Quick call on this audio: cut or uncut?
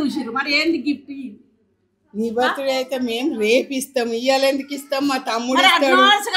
uncut